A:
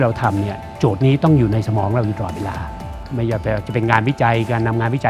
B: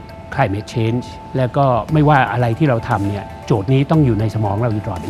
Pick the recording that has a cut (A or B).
B